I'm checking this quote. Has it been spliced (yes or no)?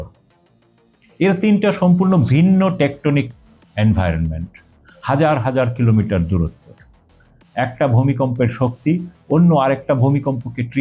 no